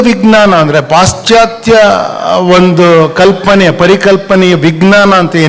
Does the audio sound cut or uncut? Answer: uncut